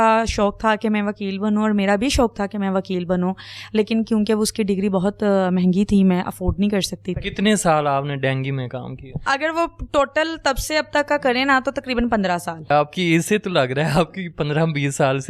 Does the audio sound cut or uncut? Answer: cut